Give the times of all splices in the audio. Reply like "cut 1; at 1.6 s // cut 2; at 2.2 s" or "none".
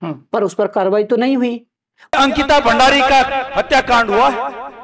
cut 1; at 2.1 s

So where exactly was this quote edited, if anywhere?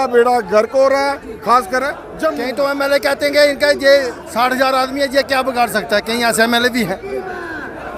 cut 1; at 2.4 s

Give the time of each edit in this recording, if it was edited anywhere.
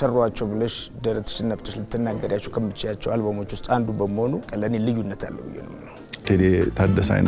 cut 1; at 4.5 s // cut 2; at 6.2 s

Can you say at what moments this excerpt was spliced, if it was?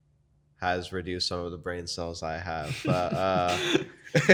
none

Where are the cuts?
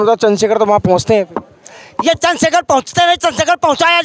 none

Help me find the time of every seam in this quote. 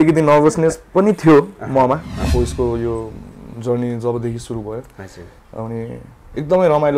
cut 1; at 2.1 s

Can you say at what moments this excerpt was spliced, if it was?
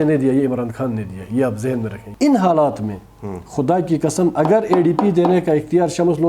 cut 1; at 2.0 s

